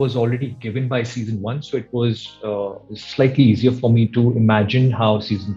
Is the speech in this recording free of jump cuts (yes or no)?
yes